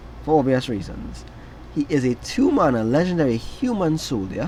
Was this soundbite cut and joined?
no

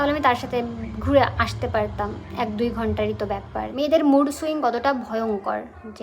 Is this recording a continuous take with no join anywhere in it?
no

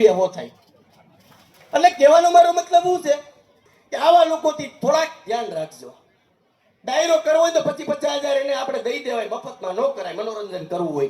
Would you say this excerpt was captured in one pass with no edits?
no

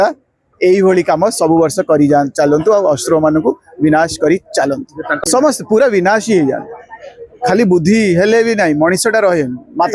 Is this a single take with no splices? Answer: no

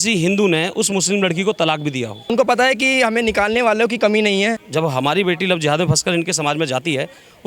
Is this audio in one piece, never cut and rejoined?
no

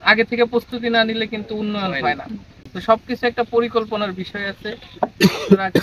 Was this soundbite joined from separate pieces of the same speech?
no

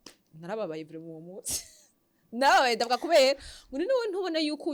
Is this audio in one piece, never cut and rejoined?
yes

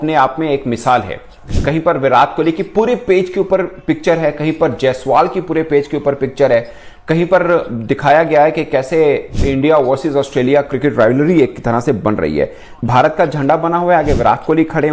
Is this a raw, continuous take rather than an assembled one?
yes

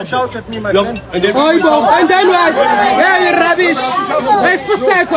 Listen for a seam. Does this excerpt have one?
no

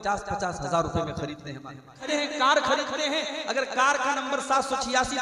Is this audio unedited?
no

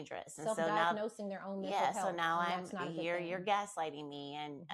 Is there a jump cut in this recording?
no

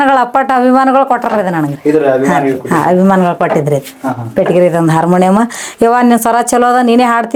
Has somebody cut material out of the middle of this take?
no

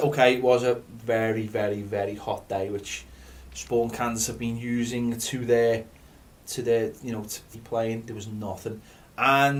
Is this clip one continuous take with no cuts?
yes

